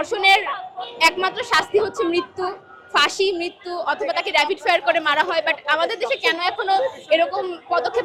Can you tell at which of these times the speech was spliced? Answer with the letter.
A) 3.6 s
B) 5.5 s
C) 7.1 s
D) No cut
D